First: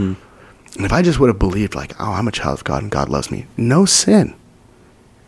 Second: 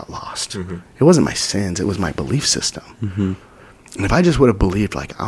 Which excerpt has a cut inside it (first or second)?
first